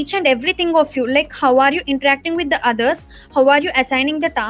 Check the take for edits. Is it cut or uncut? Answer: uncut